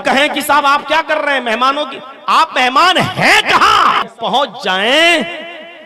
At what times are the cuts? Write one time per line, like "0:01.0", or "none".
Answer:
0:04.1